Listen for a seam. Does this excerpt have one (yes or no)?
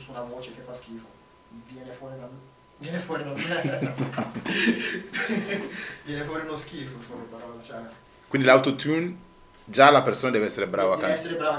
no